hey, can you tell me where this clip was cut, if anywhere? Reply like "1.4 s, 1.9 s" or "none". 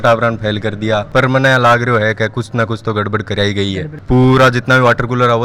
1.1 s, 3.9 s